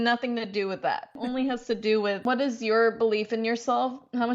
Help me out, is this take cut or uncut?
cut